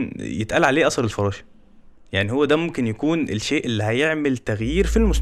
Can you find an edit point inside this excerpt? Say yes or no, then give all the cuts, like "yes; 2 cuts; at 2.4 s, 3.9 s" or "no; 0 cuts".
no; 0 cuts